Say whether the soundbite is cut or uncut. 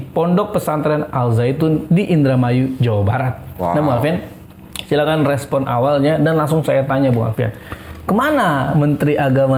uncut